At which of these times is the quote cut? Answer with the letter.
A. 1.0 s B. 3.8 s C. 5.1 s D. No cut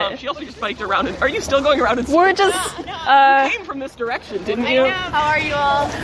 C